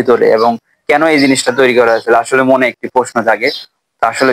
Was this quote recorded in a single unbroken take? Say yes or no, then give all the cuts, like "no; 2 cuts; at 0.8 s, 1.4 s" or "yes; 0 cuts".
yes; 0 cuts